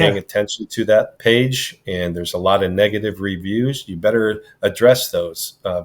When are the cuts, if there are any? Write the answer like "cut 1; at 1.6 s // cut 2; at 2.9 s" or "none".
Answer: cut 1; at 1.1 s